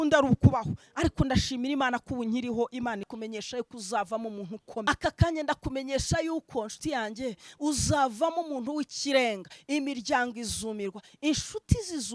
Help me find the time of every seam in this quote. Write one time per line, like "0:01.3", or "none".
0:03.1
0:04.8

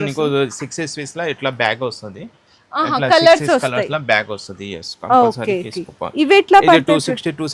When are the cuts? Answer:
none

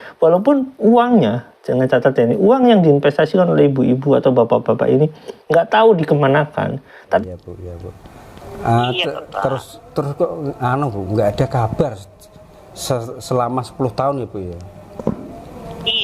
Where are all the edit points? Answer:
0:07.2

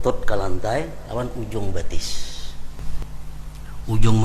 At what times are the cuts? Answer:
0:02.8

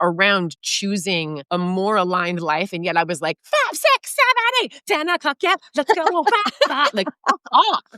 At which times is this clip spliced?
0:01.4

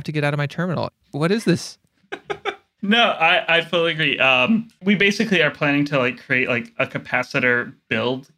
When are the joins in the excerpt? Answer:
0:01.0
0:02.7
0:04.7

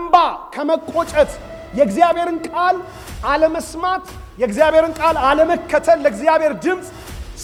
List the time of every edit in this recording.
none

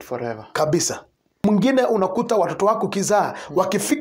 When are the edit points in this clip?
0:01.2

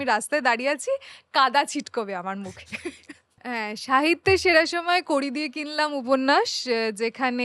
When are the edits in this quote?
0:03.4

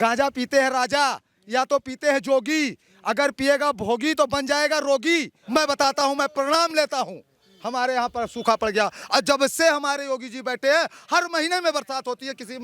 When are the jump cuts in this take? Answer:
0:05.4

